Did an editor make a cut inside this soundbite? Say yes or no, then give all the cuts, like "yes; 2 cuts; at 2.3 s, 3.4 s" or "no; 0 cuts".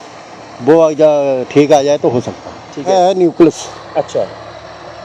yes; 1 cut; at 2.9 s